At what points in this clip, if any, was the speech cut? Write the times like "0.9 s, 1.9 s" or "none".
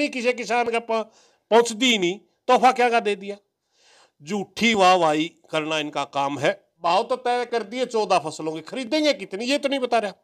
6.7 s